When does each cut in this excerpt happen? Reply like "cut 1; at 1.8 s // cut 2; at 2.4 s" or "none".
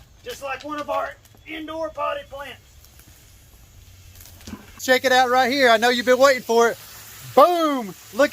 cut 1; at 4.8 s